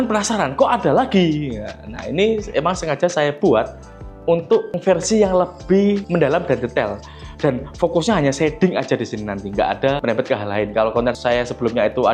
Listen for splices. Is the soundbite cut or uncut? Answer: uncut